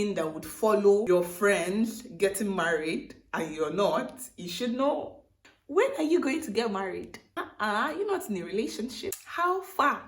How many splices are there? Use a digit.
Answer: 3